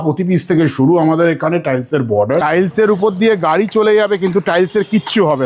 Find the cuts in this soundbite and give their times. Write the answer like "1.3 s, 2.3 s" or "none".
2.4 s